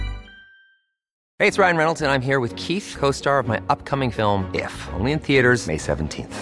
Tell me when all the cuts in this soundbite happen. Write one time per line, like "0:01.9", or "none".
0:01.2

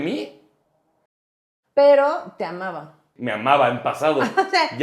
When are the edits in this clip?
0:01.2
0:03.1

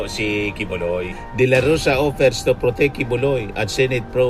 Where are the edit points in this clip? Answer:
0:01.2

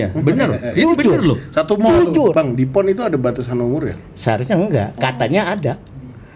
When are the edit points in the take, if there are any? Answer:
0:02.3
0:05.0

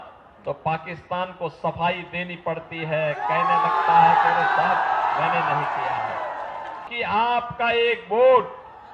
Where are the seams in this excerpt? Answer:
0:06.9

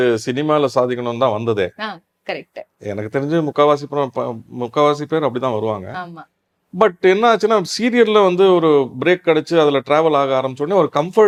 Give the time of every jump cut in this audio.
none

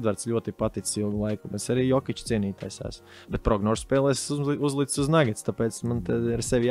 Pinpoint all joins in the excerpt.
none

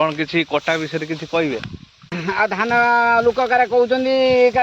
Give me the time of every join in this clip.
0:02.0

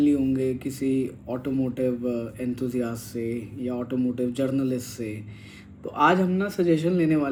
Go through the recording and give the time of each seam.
none

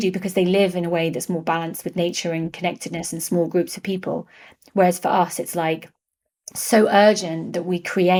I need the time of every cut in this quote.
none

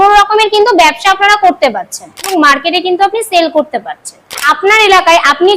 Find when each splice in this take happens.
0:02.3
0:04.5

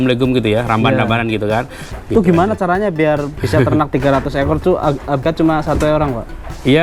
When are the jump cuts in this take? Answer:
0:01.8
0:03.9
0:05.2

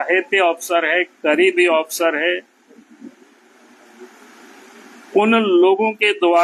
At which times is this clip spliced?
none

